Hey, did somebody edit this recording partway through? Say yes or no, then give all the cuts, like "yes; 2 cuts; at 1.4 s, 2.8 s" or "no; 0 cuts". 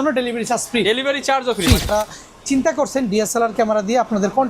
yes; 1 cut; at 1.9 s